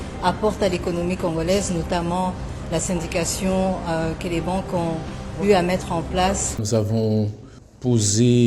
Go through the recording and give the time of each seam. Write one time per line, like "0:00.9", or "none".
0:06.5